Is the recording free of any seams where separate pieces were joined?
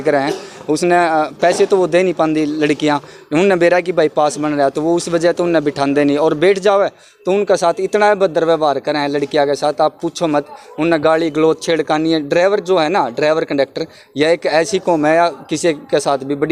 yes; 0 cuts

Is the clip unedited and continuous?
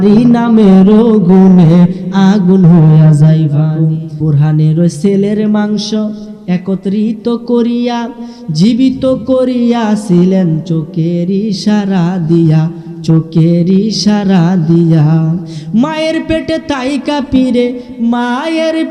no; 1 cut; at 4.0 s

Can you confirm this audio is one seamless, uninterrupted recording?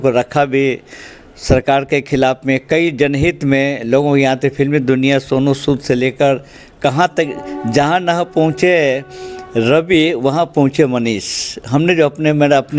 yes; 0 cuts

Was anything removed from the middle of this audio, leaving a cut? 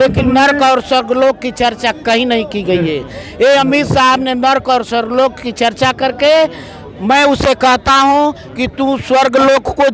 no; 0 cuts

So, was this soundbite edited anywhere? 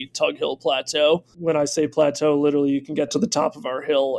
no; 0 cuts

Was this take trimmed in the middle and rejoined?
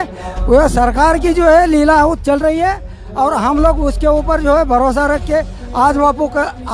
no; 0 cuts

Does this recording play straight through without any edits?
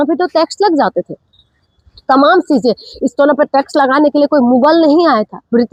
yes; 0 cuts

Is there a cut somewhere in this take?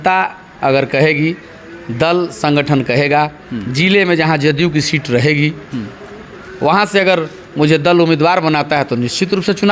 no; 0 cuts

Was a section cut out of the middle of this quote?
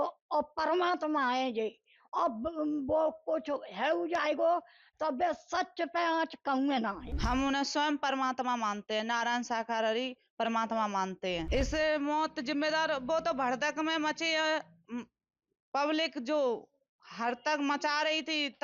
yes; 2 cuts; at 7.1 s, 11.5 s

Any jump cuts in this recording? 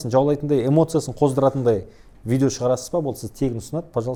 no; 0 cuts

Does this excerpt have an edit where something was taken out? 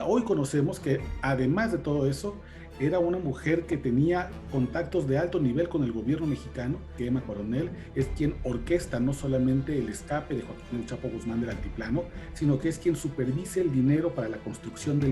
yes; 1 cut; at 6.9 s

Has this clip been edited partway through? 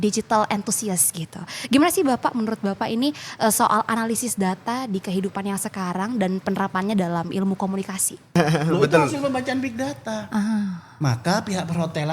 yes; 1 cut; at 8.4 s

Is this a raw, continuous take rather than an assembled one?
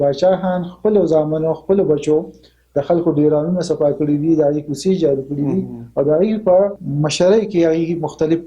no; 1 cut; at 6.8 s

